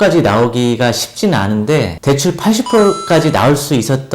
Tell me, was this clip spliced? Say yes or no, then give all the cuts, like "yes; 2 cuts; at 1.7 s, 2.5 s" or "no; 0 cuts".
yes; 1 cut; at 1.9 s